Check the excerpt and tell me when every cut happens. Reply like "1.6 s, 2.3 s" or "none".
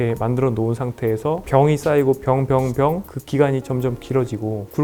1.4 s, 3.0 s